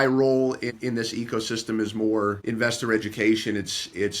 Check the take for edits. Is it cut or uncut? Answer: cut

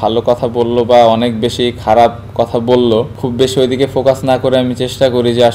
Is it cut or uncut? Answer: cut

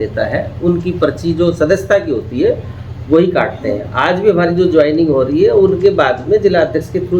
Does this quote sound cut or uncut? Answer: uncut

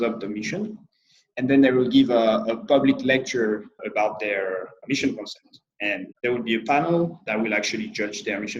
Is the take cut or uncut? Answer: cut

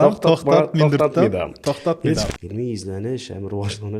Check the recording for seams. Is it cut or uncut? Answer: cut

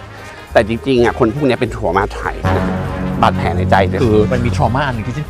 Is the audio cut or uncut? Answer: cut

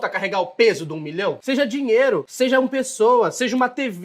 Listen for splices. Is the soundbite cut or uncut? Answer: cut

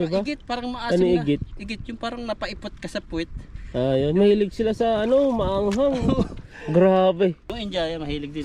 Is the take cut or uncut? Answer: cut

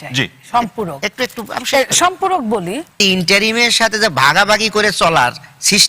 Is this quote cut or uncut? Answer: cut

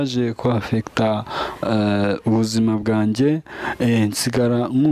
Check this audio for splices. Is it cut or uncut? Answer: uncut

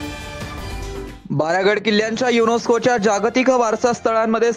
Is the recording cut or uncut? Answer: uncut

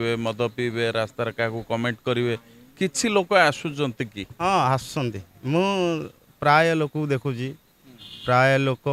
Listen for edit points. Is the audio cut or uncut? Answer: uncut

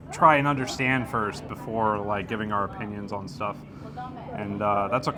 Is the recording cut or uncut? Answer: uncut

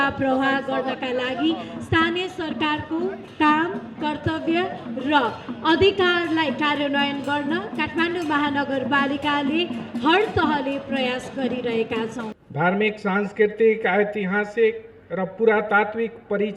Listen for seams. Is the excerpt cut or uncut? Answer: cut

